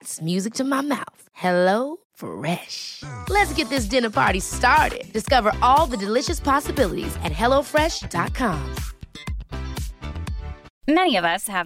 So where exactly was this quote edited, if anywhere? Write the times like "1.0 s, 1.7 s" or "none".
10.7 s